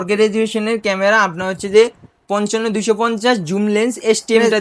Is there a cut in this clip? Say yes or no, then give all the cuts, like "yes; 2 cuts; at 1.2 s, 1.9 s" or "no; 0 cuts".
no; 0 cuts